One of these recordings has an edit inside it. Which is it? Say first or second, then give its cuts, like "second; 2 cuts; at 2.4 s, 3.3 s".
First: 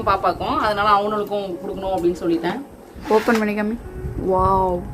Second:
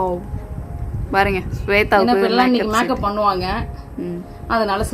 first; 1 cut; at 3.0 s